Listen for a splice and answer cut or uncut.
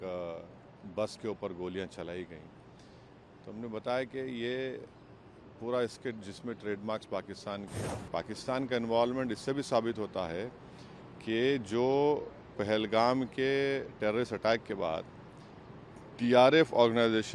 cut